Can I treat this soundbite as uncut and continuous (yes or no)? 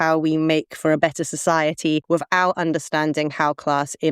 no